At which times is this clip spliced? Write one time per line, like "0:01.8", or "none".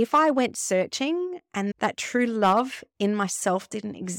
0:01.7